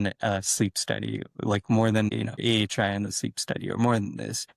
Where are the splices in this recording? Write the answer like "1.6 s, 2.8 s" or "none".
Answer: 2.1 s

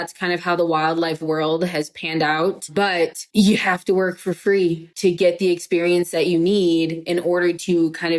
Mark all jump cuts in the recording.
none

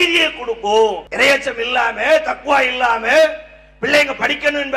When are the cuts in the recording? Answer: 1.0 s

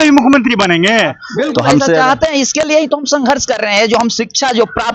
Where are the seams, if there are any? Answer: 1.2 s

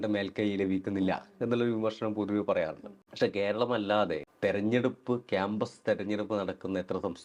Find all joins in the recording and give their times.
4.3 s

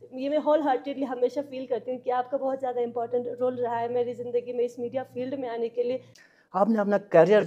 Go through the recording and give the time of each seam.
6.1 s

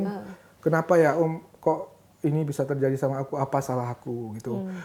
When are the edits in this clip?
none

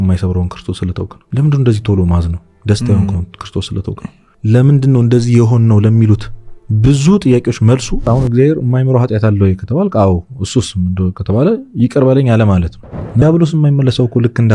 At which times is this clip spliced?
8.1 s, 13.2 s

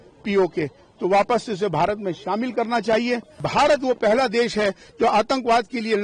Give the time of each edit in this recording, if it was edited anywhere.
3.3 s

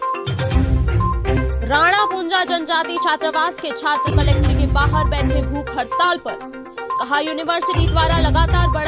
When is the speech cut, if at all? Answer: 1.3 s

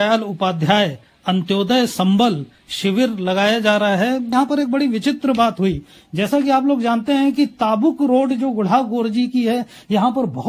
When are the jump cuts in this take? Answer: 4.3 s

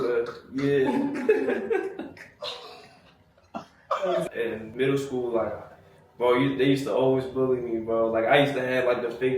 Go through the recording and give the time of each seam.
4.2 s

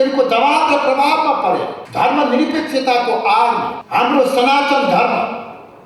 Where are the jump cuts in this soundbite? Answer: 1.8 s, 3.8 s

